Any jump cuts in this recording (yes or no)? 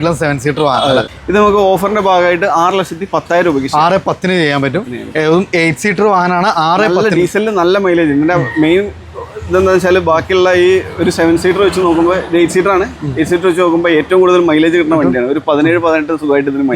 yes